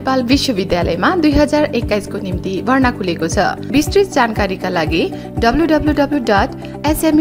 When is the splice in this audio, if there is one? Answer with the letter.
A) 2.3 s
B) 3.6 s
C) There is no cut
B